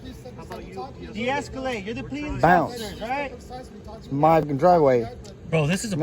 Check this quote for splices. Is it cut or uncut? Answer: cut